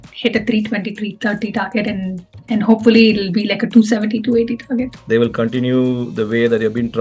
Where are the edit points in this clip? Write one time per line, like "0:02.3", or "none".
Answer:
0:05.0

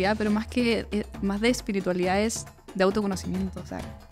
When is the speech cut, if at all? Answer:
none

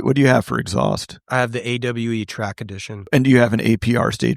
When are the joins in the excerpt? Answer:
0:01.1
0:03.1

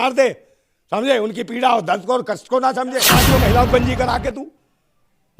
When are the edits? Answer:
0:03.1

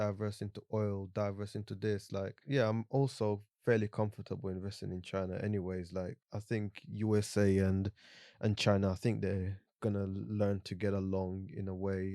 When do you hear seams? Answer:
0:02.4
0:06.3

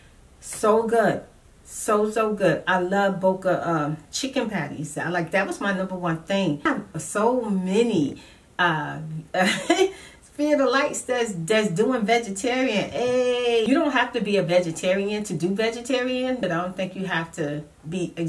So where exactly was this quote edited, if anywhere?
0:06.6
0:13.6
0:16.4

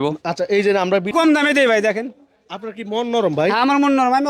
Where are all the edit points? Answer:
0:01.1

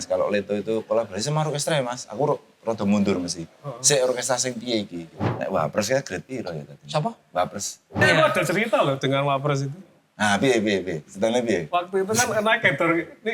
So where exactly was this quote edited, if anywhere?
0:05.2
0:08.0

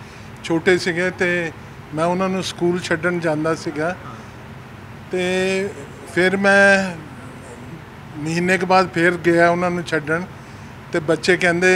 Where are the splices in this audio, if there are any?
none

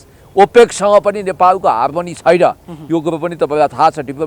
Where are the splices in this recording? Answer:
none

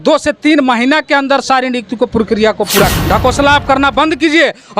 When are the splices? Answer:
0:02.9

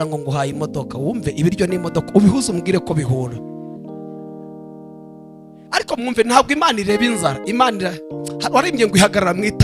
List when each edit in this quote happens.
none

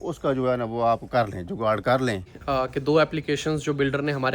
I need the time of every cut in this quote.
0:02.3

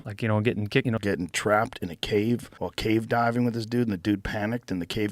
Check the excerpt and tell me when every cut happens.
0:01.0

